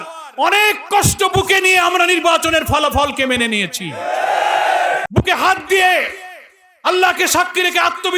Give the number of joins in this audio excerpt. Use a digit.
1